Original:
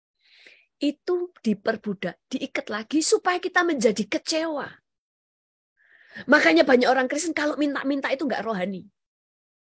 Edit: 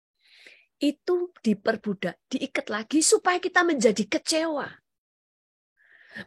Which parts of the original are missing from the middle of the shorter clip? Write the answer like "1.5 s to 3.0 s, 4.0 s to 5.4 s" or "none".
none